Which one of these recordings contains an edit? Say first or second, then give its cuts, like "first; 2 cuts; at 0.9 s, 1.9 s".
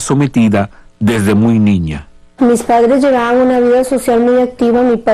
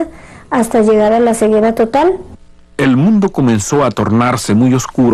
first; 1 cut; at 1.7 s